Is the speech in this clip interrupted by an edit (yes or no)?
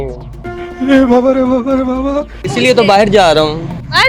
yes